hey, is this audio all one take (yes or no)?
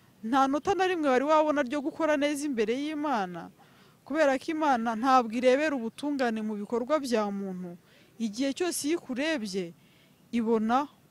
yes